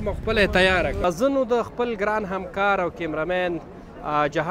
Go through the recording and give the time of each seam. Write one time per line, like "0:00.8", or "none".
0:01.0